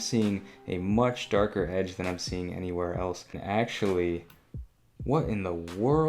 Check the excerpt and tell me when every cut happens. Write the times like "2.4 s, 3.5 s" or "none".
3.3 s